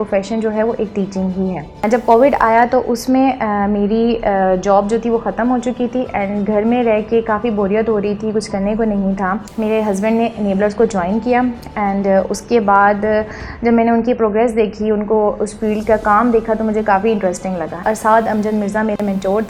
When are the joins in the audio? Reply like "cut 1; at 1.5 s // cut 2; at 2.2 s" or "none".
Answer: cut 1; at 1.8 s // cut 2; at 9.5 s // cut 3; at 17.8 s